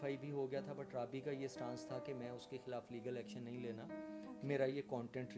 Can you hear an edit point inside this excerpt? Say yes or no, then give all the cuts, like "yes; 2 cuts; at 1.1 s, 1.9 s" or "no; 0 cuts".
no; 0 cuts